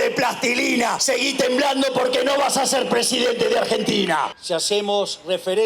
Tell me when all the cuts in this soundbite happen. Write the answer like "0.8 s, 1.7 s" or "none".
1.0 s, 4.4 s